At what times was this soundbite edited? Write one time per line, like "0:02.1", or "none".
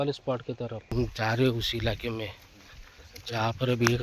0:00.9